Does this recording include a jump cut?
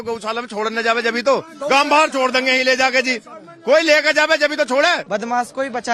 yes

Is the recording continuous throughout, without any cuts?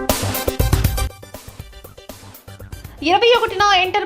no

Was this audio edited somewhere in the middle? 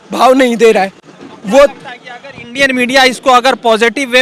no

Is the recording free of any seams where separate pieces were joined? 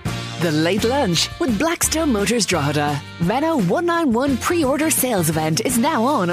yes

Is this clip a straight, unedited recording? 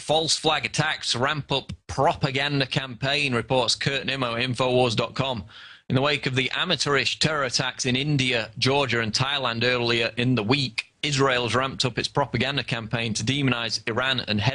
yes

